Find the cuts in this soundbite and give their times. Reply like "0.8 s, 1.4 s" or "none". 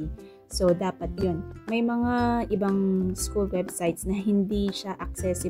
1.2 s